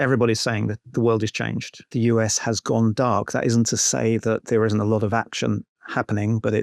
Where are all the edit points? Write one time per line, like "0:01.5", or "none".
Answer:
0:01.9